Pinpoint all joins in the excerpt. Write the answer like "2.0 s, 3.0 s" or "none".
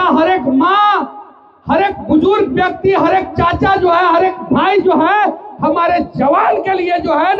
none

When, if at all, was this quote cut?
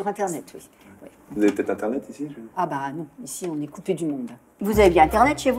none

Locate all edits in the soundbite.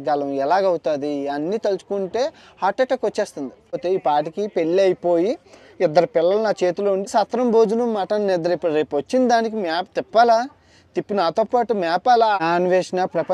3.8 s, 7.1 s, 12.4 s

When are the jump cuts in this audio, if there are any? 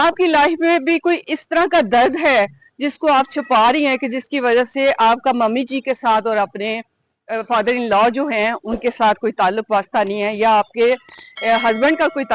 none

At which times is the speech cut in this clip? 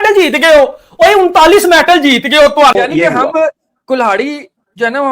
2.7 s

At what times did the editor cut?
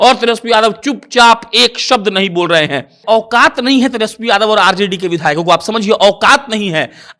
2.9 s

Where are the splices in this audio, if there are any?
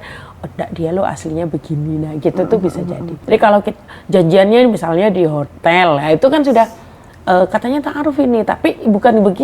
3.1 s

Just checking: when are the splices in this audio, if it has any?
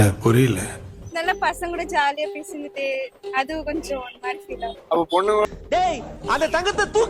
none

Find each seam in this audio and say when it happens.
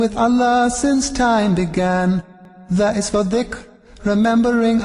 none

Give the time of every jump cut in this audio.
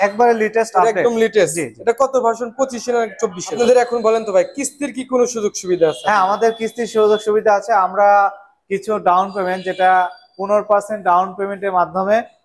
3.6 s

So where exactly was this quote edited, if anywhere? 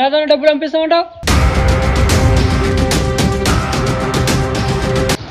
none

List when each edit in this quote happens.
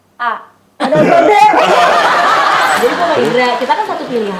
2.8 s

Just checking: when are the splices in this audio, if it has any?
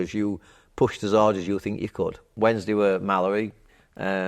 2.3 s

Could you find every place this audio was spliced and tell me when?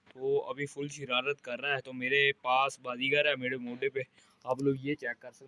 none

